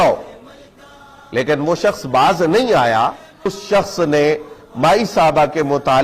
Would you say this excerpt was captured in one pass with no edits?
no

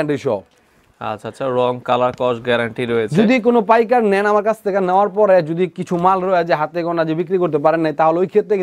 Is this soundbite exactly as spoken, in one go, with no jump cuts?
yes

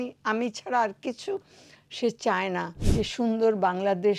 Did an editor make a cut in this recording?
yes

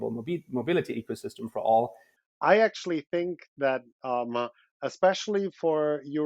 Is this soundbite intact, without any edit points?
no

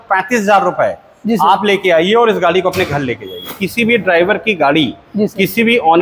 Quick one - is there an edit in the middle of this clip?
yes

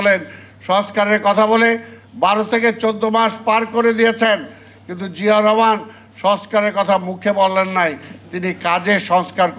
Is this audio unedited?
yes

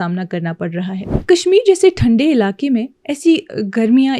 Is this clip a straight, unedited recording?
no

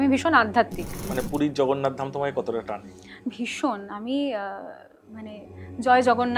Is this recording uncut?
no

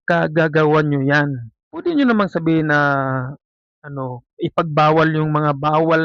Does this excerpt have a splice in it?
yes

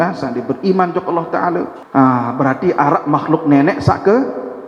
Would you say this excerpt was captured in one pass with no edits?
no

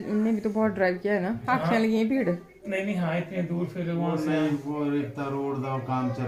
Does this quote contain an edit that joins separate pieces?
no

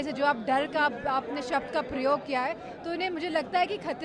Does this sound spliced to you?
no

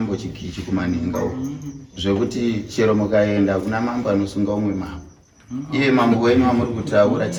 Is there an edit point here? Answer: no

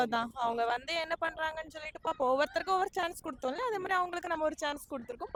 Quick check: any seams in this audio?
no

